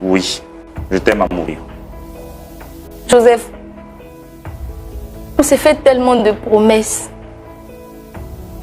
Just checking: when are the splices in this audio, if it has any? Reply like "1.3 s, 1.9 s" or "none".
none